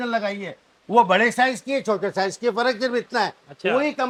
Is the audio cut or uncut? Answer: uncut